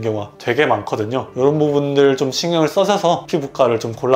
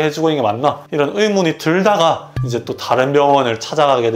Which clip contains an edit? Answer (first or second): first